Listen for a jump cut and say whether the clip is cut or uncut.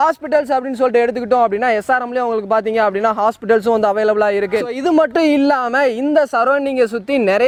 uncut